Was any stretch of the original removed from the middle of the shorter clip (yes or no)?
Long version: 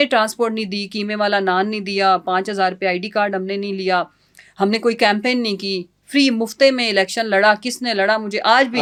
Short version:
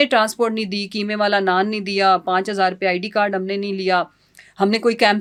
no